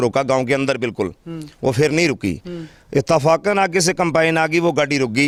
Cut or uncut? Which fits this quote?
uncut